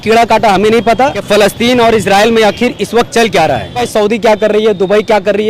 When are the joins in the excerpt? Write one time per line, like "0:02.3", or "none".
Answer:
0:01.2
0:03.8